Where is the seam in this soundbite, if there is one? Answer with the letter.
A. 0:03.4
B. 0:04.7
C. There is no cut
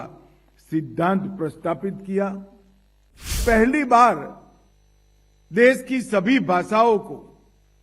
A